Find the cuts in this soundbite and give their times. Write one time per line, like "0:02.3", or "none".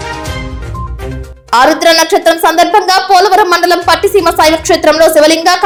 none